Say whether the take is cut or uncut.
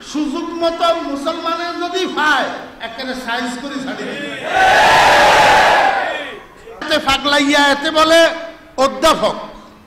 cut